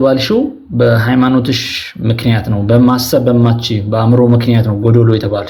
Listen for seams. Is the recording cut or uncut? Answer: uncut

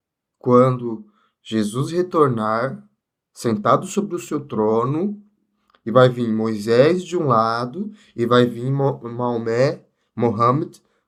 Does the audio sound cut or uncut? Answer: uncut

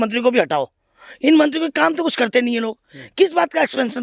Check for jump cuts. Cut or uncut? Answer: uncut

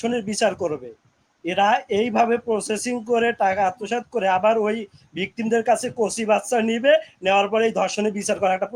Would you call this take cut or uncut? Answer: uncut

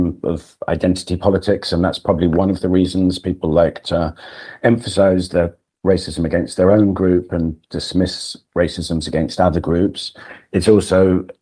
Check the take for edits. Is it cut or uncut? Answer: uncut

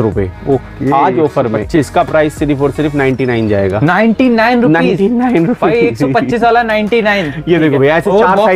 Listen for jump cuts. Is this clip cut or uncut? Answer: uncut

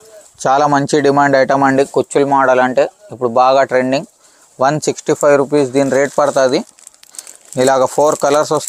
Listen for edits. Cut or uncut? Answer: uncut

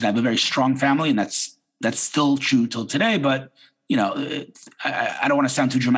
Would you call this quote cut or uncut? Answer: uncut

